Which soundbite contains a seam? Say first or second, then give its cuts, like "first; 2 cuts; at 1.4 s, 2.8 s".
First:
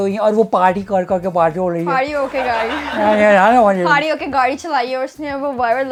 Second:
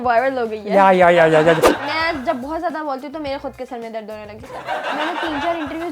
second; 2 cuts; at 1.7 s, 4.8 s